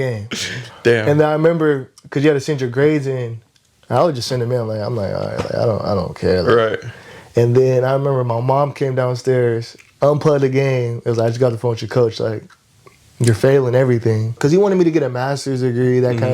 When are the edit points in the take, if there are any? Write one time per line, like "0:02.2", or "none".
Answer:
0:14.3